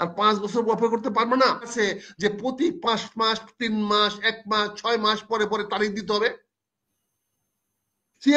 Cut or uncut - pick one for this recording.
cut